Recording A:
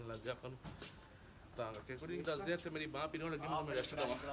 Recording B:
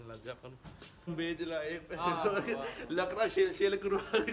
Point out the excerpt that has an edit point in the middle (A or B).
B